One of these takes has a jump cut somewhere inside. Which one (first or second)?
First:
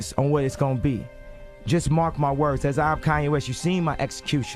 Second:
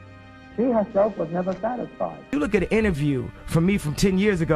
second